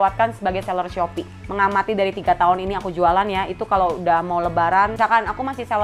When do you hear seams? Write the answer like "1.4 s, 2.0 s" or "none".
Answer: 1.6 s, 5.0 s